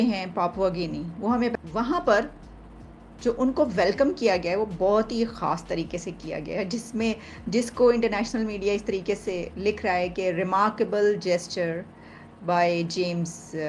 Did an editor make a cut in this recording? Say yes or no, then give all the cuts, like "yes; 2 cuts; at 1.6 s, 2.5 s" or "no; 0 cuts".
yes; 1 cut; at 1.5 s